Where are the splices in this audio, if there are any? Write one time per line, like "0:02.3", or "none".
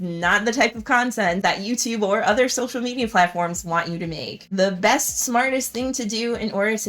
none